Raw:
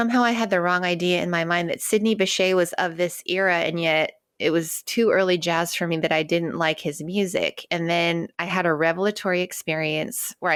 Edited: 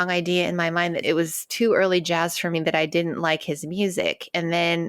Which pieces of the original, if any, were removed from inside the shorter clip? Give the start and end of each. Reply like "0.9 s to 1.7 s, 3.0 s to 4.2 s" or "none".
1.7 s to 4.4 s